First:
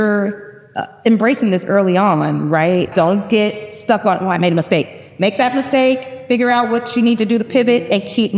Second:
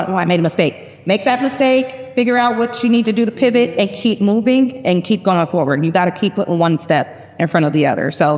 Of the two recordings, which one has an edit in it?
first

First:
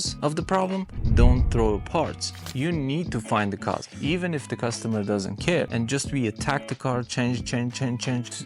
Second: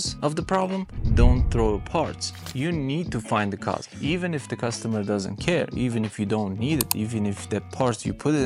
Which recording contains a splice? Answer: first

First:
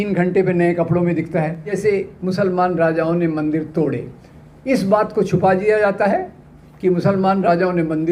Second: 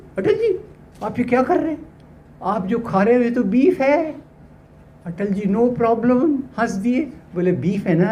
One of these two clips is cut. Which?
first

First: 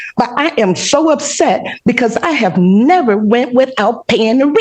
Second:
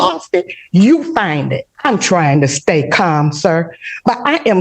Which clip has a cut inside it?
second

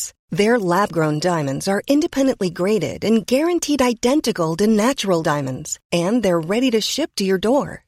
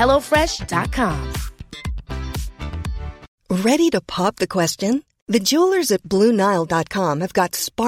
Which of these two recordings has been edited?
second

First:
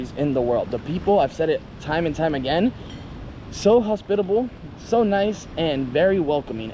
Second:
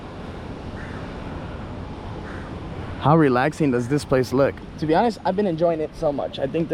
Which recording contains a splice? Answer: second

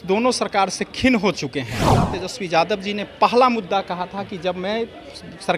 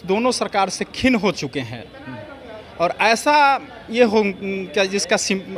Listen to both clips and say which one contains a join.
first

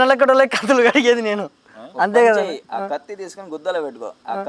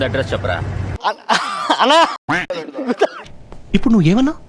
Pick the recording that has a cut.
second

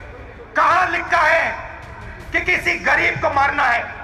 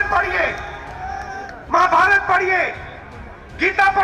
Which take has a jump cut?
second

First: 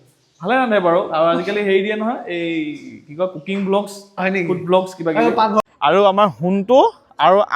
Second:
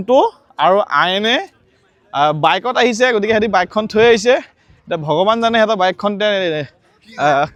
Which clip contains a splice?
first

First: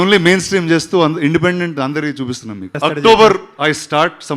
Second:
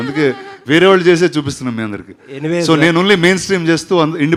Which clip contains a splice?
first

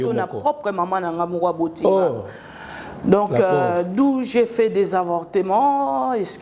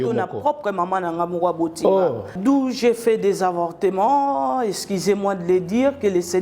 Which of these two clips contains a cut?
second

